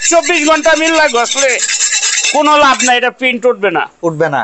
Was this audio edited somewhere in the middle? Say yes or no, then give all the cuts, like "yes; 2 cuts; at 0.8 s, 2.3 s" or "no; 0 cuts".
no; 0 cuts